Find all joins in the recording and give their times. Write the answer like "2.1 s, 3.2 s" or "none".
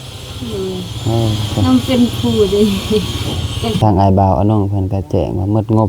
3.8 s